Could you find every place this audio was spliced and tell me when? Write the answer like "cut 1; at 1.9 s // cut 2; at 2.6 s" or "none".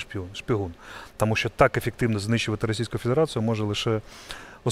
none

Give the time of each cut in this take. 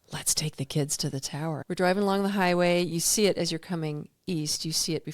cut 1; at 1.6 s

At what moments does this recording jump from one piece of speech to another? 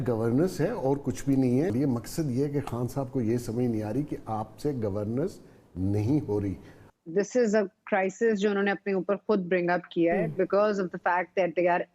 cut 1; at 1.7 s // cut 2; at 6.9 s

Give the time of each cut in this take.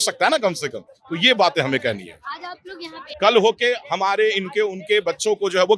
cut 1; at 3.1 s

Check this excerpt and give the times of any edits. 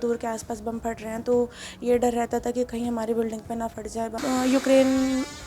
cut 1; at 4.2 s

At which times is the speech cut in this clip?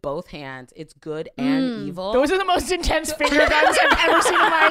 cut 1; at 2.1 s

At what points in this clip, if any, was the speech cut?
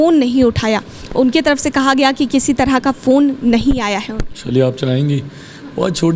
none

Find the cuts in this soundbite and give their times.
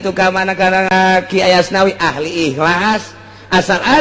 cut 1; at 0.9 s

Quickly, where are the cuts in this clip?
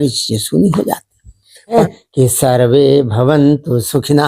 cut 1; at 1.6 s

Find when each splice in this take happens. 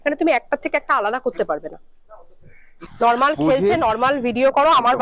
none

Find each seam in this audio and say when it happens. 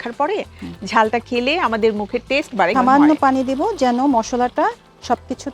cut 1; at 2.7 s

